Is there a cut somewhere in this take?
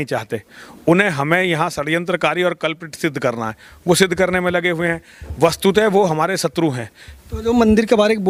no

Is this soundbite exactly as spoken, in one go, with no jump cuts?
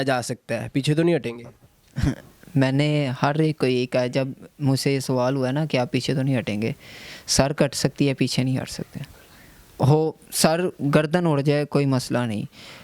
yes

